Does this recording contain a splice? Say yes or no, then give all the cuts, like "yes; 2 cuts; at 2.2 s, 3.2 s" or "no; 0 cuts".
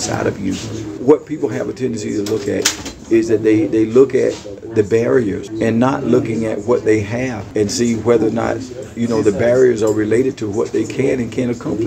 yes; 3 cuts; at 1.0 s, 5.5 s, 7.4 s